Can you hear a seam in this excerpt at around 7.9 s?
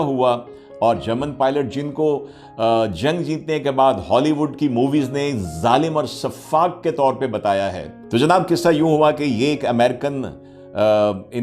yes; 1 cut; at 7.9 s

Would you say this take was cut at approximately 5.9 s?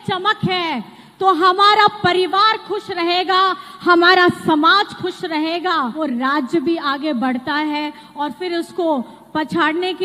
yes; 1 cut; at 5.9 s

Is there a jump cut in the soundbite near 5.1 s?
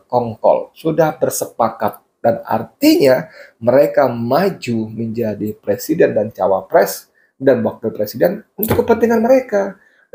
no; 0 cuts

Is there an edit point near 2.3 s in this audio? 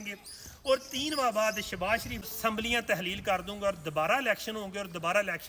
yes; 1 cut; at 2.3 s

